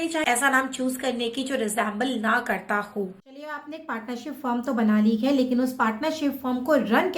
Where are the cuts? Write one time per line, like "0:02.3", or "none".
none